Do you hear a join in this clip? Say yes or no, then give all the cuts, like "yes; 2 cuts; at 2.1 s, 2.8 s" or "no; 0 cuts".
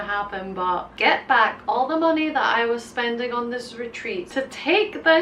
yes; 2 cuts; at 0.9 s, 4.3 s